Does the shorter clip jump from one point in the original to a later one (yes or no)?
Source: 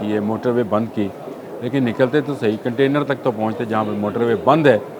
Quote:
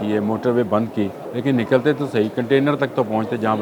yes